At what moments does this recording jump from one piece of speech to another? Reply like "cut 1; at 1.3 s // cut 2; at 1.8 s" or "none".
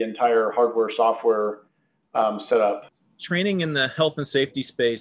cut 1; at 2.9 s